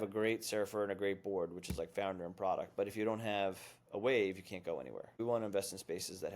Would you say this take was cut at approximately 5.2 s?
yes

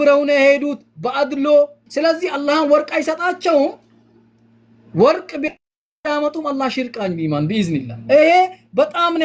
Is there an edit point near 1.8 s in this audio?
yes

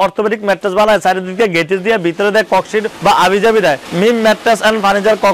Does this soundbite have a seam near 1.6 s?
no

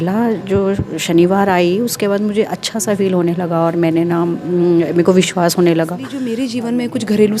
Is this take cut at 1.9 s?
no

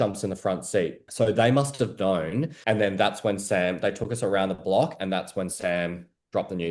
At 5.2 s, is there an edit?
no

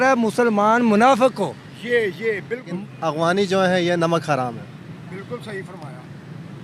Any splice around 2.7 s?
yes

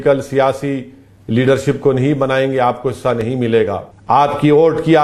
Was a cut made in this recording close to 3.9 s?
yes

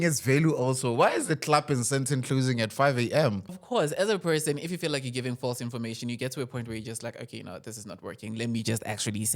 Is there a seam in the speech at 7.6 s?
no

